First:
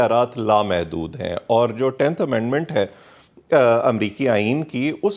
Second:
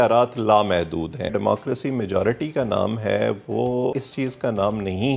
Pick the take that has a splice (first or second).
second